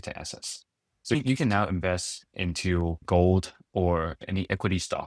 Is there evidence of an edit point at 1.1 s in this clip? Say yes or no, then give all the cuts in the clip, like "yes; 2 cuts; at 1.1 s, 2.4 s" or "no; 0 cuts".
yes; 3 cuts; at 1.1 s, 3.0 s, 4.2 s